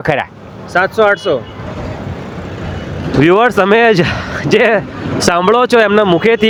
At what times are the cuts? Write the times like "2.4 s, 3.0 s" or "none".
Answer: none